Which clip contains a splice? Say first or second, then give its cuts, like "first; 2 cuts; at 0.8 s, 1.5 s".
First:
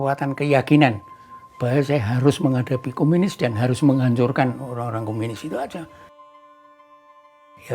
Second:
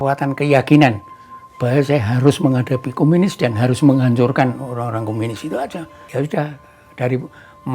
second; 1 cut; at 6.0 s